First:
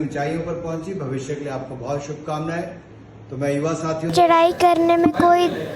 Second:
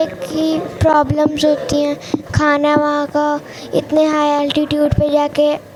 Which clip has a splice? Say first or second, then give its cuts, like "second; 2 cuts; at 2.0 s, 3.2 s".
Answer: first; 1 cut; at 4.1 s